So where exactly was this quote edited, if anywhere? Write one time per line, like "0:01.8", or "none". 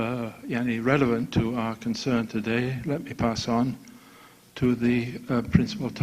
0:04.8